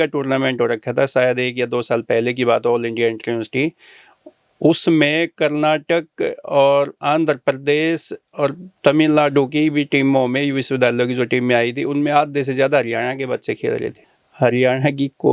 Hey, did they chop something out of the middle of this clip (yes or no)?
yes